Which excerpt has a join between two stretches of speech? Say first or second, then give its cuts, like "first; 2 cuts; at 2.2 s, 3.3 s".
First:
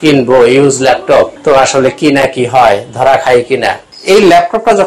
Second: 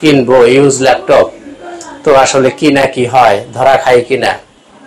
first; 2 cuts; at 1.4 s, 3.9 s